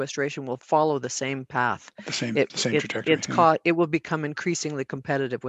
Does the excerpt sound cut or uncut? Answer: uncut